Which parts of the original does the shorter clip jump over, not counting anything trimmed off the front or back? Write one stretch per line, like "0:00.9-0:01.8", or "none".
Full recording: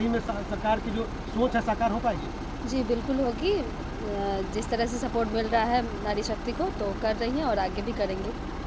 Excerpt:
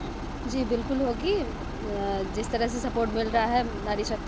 none

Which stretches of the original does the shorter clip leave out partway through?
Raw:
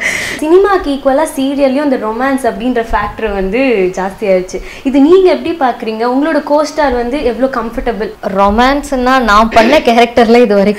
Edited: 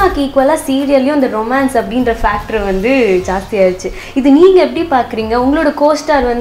none

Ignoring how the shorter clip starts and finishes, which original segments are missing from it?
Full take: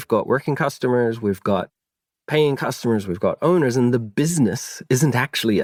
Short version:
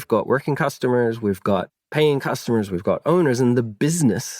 0:01.8-0:02.1

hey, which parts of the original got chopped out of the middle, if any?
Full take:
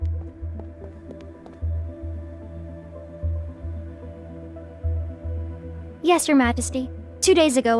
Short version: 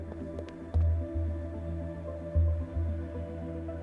none

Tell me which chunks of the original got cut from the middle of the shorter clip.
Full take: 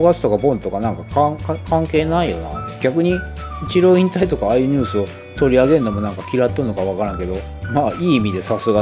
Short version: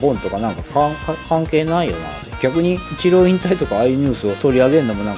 0:03.3-0:03.6
0:05.0-0:05.3

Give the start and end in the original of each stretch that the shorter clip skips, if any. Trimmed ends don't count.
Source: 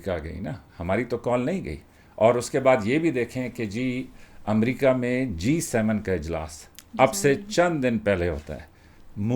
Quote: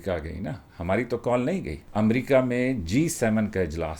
0:01.8-0:04.3

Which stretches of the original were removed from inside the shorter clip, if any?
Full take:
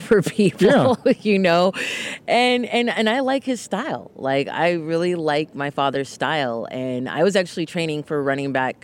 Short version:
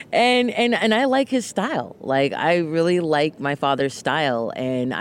none

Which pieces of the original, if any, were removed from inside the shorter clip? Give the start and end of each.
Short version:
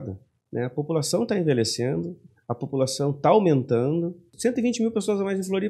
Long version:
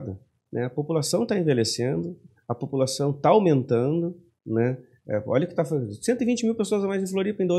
0:04.3-0:05.9

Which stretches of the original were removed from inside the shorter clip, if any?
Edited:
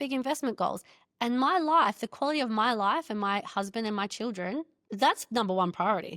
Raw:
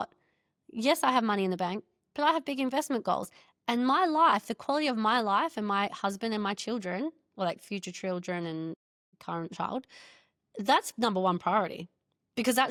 0:07.2-0:10.4

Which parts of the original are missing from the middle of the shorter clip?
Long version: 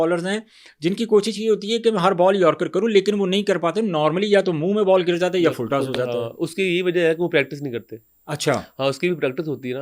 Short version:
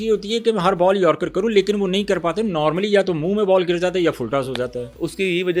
none

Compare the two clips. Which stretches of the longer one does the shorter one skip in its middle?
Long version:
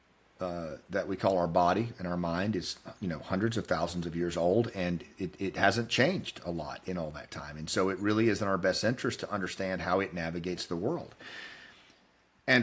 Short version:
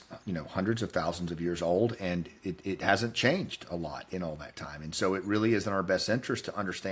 none

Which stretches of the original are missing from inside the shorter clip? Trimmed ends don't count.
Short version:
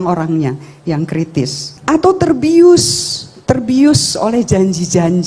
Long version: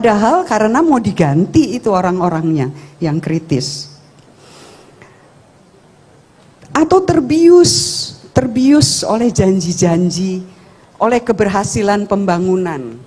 0:03.8-0:06.5

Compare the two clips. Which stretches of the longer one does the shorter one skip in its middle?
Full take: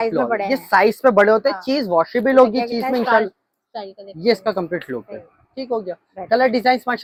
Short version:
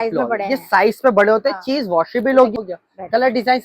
0:02.5-0:05.7

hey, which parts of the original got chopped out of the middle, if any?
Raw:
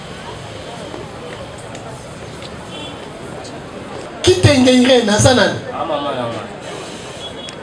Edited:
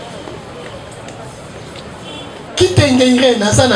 0:03.1-0:04.1

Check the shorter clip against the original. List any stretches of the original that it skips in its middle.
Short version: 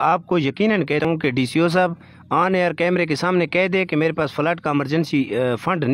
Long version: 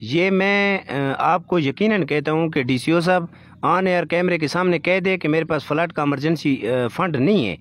0:02.2-0:02.4

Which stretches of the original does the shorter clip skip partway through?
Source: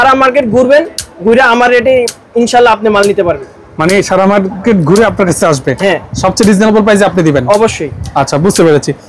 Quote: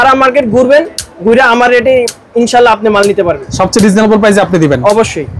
0:03.5-0:06.1

